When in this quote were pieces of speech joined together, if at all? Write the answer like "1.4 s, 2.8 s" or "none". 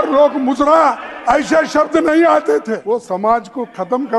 2.8 s